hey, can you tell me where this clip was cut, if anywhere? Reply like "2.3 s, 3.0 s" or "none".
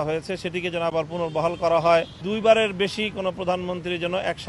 2.2 s